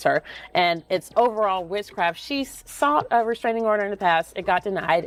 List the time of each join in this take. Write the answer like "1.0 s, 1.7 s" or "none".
none